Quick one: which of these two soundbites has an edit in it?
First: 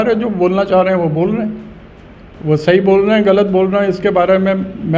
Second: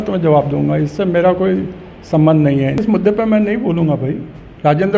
second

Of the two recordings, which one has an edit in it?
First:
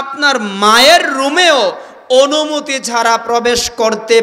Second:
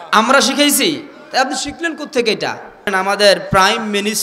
second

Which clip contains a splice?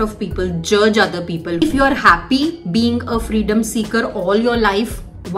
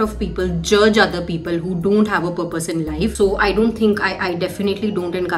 first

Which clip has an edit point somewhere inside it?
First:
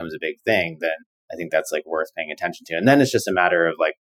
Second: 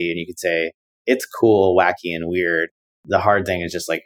second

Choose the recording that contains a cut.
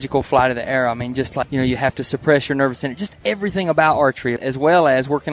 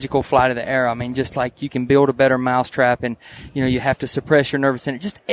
first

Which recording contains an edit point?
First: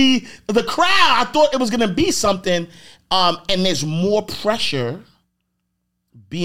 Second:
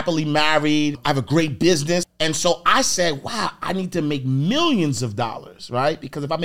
second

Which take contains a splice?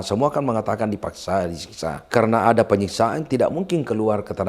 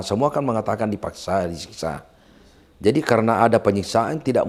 first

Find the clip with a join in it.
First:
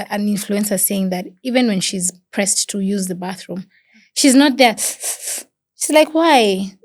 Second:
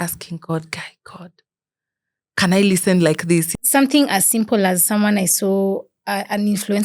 second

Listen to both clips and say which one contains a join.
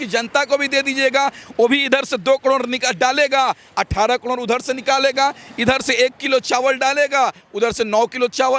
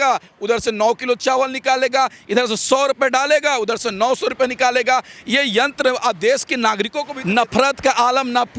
second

